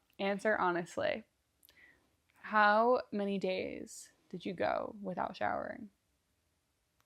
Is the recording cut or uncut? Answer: uncut